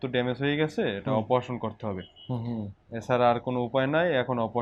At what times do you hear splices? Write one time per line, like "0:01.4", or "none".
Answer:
none